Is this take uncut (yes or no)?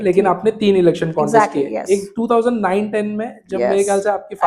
yes